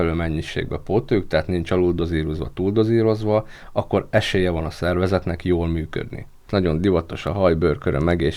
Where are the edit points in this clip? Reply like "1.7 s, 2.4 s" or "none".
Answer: 6.4 s